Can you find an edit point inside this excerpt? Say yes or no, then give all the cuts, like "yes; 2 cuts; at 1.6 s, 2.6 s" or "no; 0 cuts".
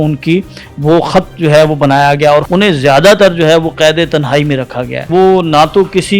yes; 2 cuts; at 2.5 s, 5.1 s